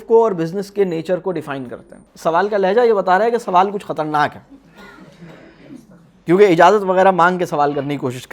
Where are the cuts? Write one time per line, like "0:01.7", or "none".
0:02.0